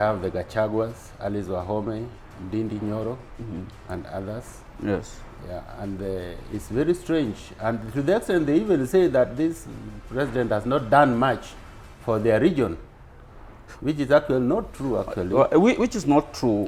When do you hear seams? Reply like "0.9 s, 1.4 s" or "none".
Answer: none